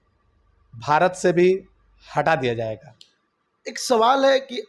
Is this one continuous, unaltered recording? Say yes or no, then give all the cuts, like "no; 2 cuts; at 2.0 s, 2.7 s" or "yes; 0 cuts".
yes; 0 cuts